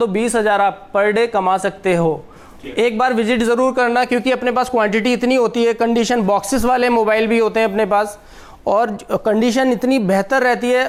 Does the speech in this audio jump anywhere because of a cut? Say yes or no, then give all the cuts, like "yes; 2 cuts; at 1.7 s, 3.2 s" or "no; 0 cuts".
no; 0 cuts